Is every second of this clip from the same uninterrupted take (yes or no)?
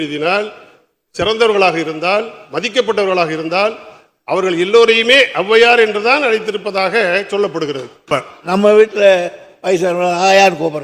no